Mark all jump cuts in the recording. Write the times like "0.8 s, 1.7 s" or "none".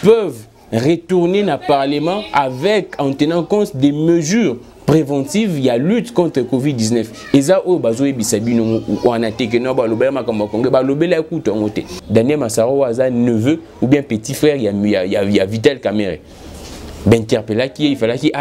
12.0 s

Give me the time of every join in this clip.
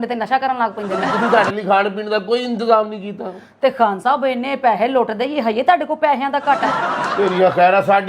1.1 s

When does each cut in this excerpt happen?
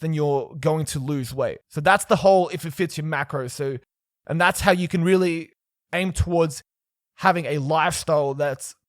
1.7 s

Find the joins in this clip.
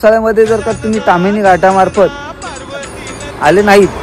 2.8 s

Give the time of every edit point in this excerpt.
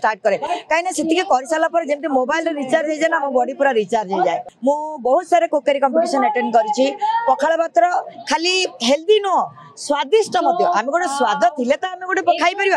4.5 s

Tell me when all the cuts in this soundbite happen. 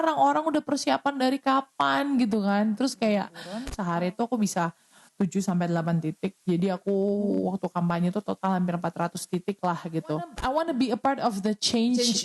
3.7 s, 10.4 s

